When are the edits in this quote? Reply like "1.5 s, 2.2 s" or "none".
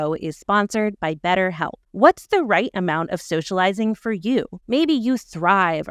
1.8 s, 4.6 s